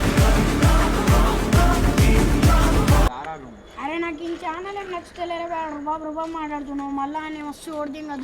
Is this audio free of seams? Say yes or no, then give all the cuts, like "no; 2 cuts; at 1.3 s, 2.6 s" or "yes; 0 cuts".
no; 1 cut; at 3.1 s